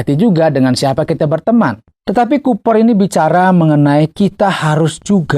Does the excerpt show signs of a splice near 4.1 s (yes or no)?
no